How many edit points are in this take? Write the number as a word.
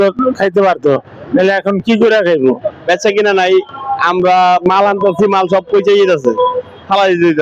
zero